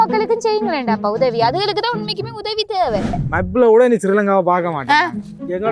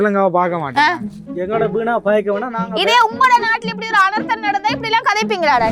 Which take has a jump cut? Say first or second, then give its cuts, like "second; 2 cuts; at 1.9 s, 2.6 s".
first; 1 cut; at 3.2 s